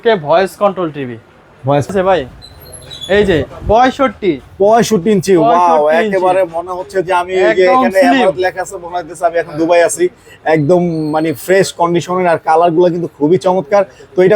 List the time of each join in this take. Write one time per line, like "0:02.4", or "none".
0:01.9